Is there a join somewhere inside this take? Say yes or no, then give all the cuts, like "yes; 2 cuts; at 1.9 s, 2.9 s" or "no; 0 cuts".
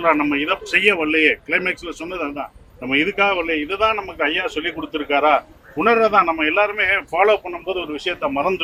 no; 0 cuts